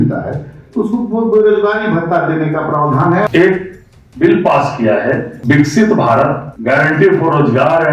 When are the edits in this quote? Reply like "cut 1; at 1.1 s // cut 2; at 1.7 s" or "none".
cut 1; at 3.3 s // cut 2; at 5.3 s // cut 3; at 6.5 s